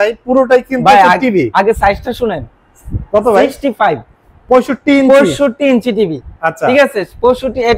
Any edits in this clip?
no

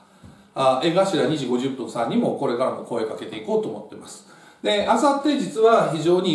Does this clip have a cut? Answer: no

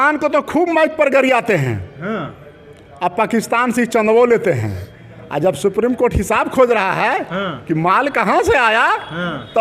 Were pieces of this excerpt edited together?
no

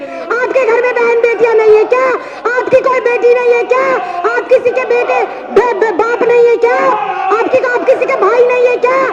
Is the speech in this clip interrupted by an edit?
no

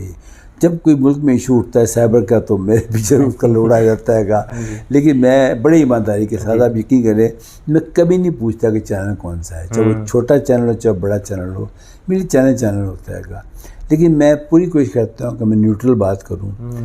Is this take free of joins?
yes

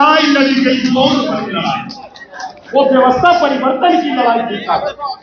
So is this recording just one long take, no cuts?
yes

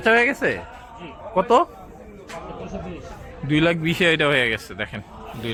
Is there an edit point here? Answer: no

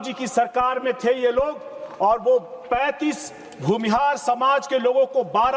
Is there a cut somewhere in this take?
no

